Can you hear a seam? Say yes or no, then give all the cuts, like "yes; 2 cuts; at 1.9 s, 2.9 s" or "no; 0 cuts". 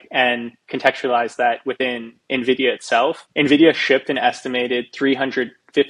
yes; 1 cut; at 3.2 s